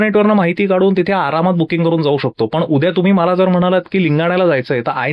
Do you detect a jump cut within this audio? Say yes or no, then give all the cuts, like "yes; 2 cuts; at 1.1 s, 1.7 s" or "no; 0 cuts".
no; 0 cuts